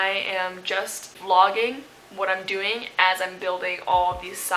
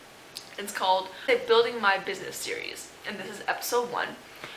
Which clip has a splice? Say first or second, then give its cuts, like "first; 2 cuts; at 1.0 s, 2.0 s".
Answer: second; 1 cut; at 1.2 s